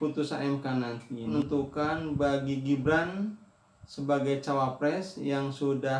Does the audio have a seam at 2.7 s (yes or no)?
no